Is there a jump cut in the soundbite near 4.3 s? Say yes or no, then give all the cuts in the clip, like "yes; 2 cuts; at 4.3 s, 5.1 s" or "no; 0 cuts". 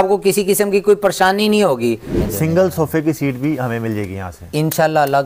no; 1 cut; at 2.1 s